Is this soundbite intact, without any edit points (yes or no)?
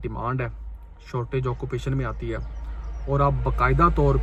yes